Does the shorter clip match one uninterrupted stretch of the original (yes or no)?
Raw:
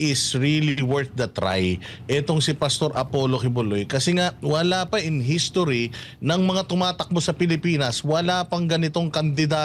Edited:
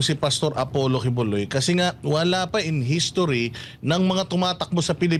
yes